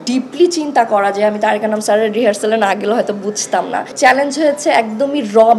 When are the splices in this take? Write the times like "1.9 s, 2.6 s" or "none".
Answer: 3.9 s

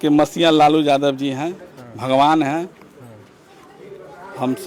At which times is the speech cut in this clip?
none

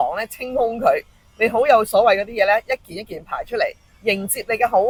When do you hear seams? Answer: none

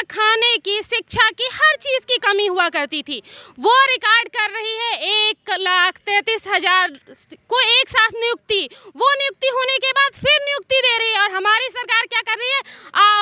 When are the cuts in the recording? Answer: none

